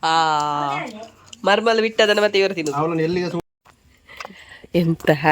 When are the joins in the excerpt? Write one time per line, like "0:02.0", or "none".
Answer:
0:03.4

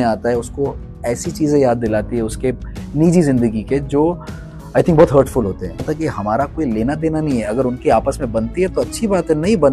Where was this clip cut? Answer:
0:05.8

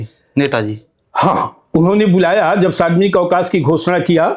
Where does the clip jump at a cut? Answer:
none

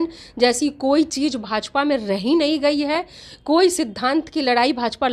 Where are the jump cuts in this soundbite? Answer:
none

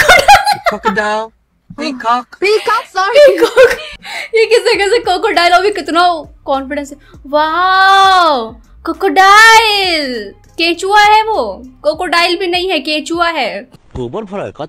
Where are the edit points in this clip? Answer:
0:13.8

